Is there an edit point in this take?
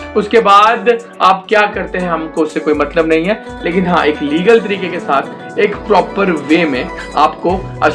no; 0 cuts

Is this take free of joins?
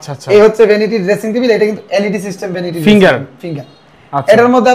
yes; 0 cuts

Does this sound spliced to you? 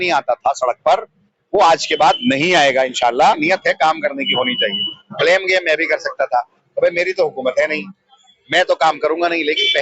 yes; 1 cut; at 3.4 s

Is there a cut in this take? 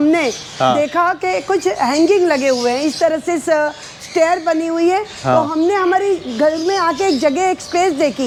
no; 0 cuts

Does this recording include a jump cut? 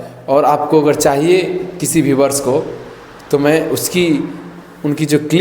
no; 0 cuts

